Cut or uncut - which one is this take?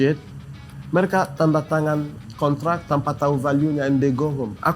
cut